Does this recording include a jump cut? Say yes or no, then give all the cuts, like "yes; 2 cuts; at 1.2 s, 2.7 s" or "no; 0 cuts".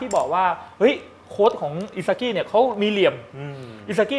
no; 0 cuts